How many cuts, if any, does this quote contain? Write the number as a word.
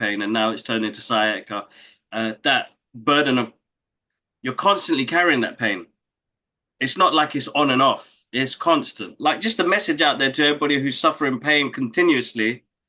one